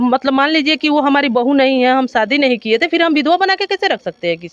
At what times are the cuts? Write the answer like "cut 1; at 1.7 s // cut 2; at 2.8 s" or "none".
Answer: none